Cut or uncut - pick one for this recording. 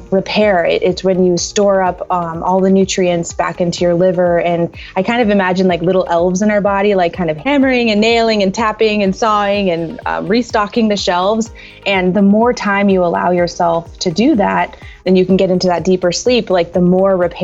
cut